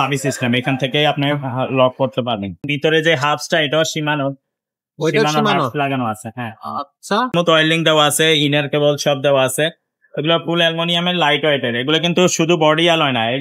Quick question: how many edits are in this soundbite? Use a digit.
2